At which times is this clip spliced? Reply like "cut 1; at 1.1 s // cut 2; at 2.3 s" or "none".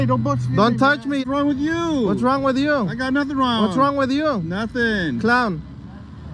cut 1; at 1.2 s